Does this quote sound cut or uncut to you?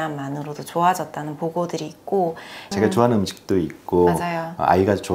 cut